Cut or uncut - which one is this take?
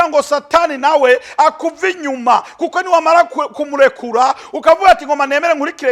uncut